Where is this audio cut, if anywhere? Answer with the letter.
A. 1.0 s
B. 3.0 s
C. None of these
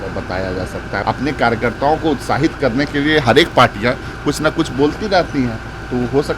A